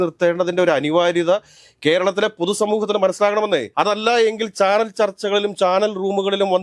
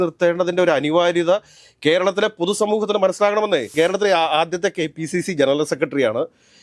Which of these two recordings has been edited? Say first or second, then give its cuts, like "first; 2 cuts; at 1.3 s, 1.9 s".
second; 1 cut; at 3.7 s